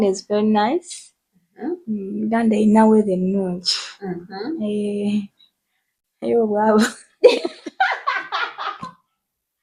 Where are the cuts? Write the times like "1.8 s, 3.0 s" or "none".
none